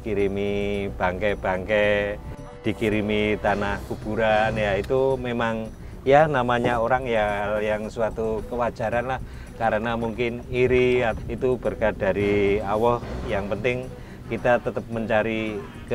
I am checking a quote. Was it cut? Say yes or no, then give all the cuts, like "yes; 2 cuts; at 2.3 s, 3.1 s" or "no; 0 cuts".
yes; 2 cuts; at 11.2 s, 13.3 s